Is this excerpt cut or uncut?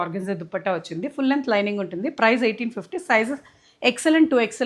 uncut